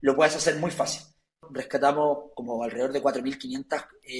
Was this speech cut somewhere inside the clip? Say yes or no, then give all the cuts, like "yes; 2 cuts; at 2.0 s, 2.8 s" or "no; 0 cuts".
yes; 1 cut; at 1.4 s